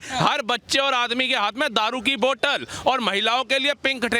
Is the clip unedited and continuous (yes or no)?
yes